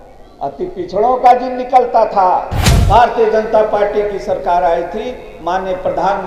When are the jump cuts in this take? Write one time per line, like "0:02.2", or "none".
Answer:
0:02.7